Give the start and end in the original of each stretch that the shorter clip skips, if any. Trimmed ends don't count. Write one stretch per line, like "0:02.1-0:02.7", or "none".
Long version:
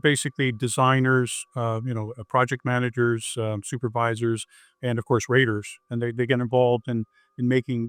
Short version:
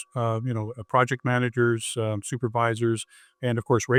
none